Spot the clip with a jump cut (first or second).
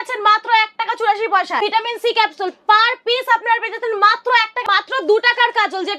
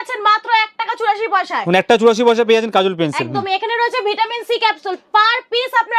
first